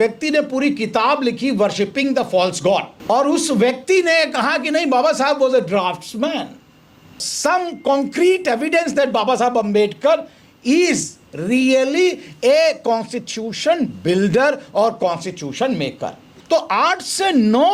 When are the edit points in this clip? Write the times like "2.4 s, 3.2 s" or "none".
2.9 s, 7.2 s, 16.3 s